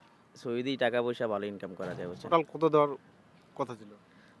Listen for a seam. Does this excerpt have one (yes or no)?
yes